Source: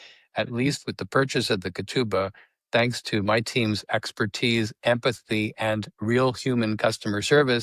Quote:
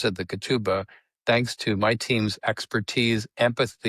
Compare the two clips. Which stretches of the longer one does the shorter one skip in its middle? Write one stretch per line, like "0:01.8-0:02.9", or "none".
none